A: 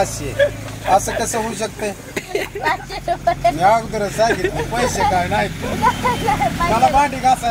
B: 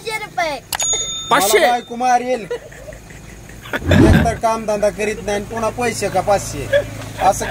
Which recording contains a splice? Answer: A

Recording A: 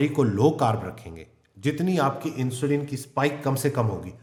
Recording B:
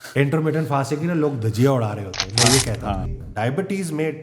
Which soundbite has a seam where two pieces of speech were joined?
B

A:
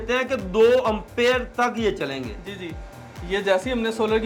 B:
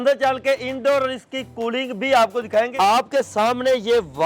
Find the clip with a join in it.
B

